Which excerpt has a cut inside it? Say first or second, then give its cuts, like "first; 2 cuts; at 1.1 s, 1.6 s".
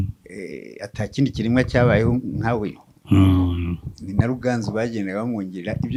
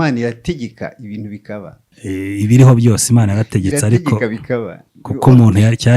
second; 1 cut; at 1.8 s